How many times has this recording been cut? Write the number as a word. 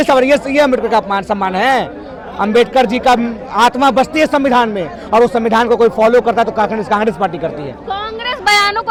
zero